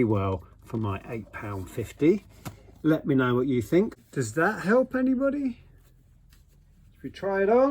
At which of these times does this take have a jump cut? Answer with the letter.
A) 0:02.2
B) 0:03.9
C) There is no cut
B